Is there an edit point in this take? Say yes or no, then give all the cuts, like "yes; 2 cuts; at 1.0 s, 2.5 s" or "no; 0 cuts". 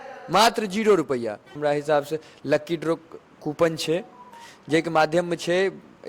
yes; 1 cut; at 1.5 s